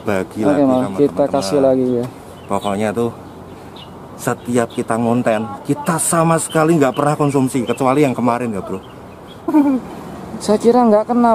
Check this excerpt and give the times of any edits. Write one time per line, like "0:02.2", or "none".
0:09.5